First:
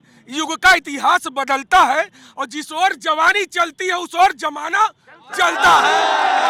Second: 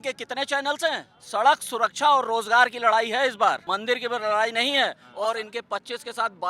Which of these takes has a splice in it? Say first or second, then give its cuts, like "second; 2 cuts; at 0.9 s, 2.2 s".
second; 3 cuts; at 1.1 s, 3.6 s, 5.0 s